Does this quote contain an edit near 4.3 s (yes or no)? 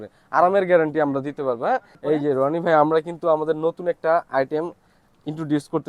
no